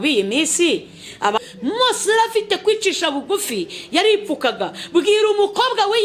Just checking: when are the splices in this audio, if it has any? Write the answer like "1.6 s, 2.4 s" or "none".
1.4 s